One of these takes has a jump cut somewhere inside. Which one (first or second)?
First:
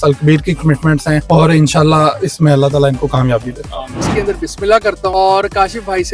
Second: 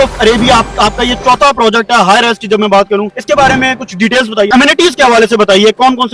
first